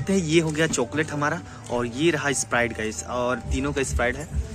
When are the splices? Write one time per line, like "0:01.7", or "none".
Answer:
none